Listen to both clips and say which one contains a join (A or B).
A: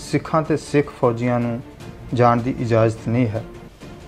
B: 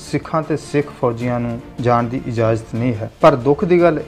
B